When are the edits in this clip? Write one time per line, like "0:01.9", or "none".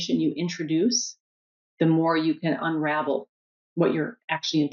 none